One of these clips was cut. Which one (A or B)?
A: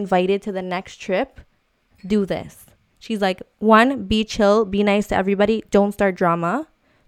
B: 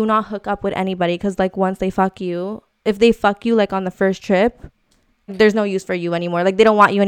B